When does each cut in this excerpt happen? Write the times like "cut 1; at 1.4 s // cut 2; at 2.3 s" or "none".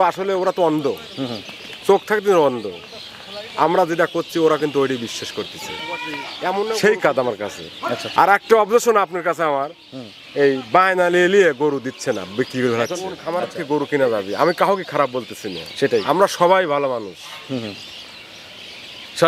cut 1; at 6.7 s // cut 2; at 13.1 s